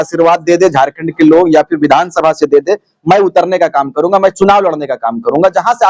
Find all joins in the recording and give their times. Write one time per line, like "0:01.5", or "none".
none